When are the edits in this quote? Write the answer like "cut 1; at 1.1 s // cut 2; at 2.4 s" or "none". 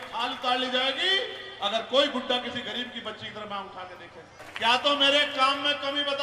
cut 1; at 4.4 s